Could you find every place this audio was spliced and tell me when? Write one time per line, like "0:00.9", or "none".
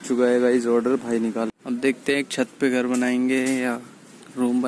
0:01.5